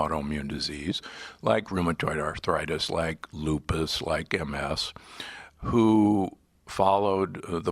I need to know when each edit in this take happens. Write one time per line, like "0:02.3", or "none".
0:02.4